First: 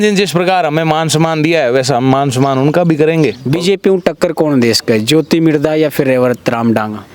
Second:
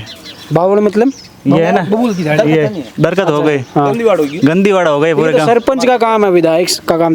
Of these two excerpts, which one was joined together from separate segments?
first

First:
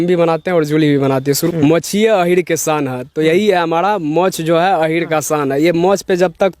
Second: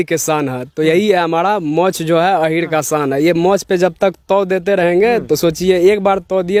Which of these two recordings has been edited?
first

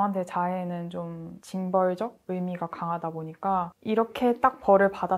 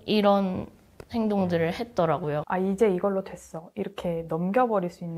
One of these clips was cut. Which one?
second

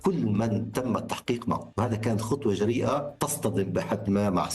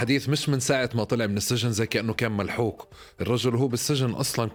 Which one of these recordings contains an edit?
first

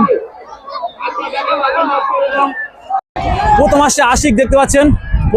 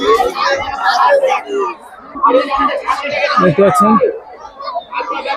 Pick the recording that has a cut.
first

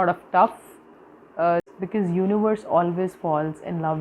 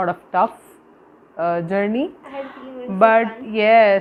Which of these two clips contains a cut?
first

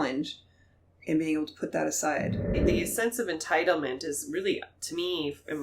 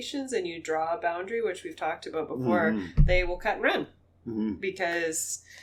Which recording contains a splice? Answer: first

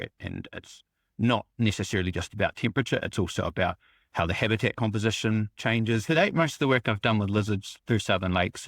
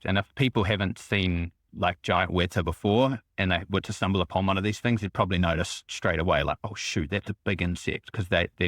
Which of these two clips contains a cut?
first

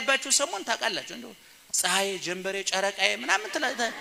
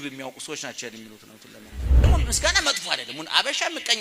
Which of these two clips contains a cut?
second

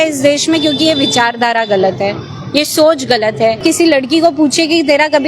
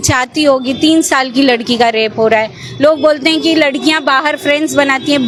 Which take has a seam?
first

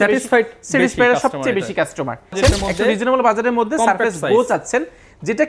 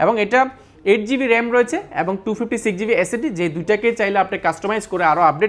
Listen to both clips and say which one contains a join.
first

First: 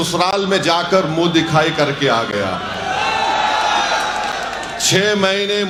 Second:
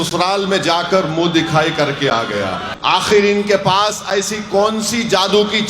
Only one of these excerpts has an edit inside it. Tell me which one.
second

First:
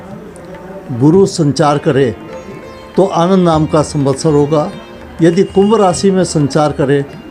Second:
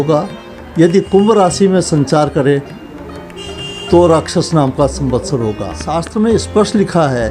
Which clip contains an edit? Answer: second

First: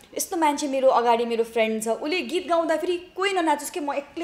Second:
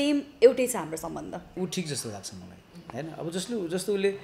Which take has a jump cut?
second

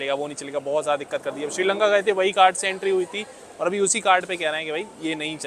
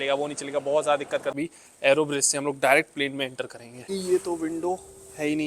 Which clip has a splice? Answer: second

